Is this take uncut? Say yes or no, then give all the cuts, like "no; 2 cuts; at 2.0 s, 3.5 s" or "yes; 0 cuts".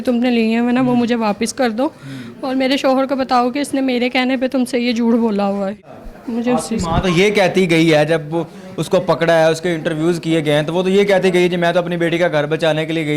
no; 1 cut; at 5.8 s